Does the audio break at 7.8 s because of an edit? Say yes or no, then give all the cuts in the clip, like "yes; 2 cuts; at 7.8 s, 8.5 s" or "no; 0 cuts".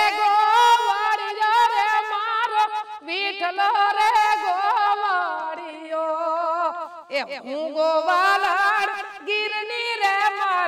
no; 0 cuts